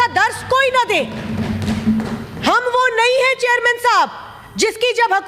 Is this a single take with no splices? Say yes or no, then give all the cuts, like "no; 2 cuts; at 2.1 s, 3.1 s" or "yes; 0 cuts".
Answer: yes; 0 cuts